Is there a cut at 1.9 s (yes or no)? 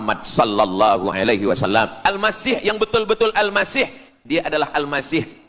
yes